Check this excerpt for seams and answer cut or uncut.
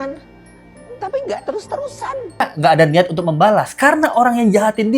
cut